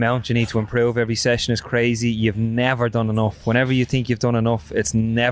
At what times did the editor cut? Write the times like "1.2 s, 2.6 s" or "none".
none

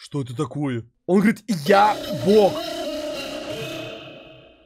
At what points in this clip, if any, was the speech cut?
0.9 s

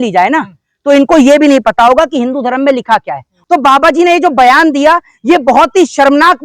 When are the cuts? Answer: 3.3 s

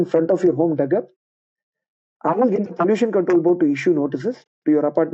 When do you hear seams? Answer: none

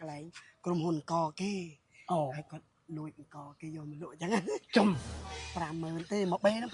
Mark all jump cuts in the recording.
5.4 s

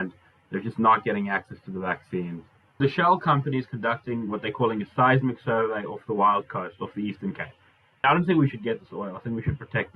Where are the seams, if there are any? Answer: 2.8 s, 8.0 s

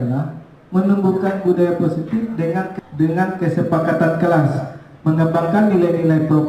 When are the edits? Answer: 2.7 s

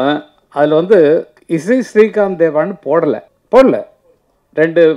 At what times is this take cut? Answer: 3.3 s

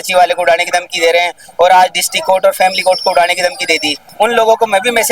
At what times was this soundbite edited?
4.1 s

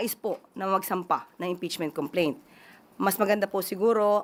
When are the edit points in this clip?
none

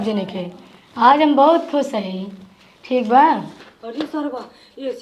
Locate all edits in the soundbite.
4.1 s

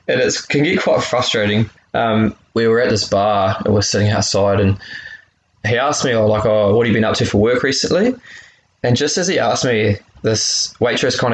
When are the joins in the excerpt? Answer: 2.4 s

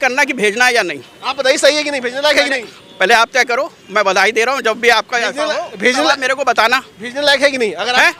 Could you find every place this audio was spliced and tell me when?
none

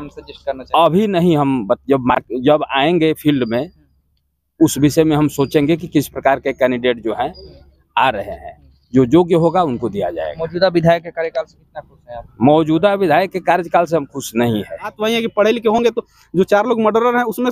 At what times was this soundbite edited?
15.0 s

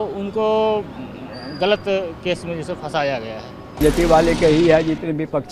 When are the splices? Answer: 3.8 s

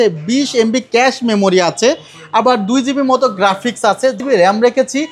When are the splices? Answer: 4.2 s

